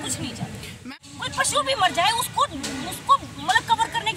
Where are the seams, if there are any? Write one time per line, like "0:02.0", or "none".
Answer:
0:00.9